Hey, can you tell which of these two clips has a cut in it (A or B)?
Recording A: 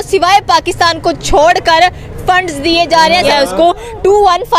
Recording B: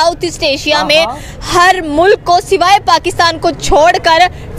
A